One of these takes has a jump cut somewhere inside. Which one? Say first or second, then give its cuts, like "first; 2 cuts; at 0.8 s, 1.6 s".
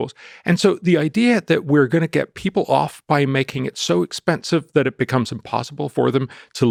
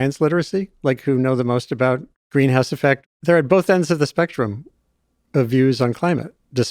second; 2 cuts; at 2.2 s, 3.0 s